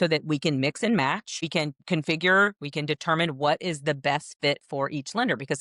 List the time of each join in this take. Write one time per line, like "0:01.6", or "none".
0:01.8

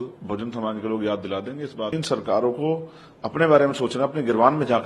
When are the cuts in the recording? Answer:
0:02.0

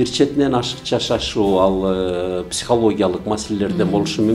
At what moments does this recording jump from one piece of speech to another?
none

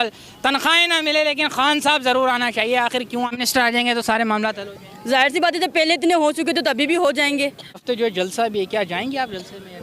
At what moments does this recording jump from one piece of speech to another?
0:03.3
0:07.8

